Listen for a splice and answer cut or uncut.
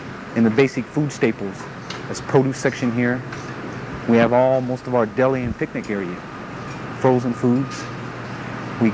cut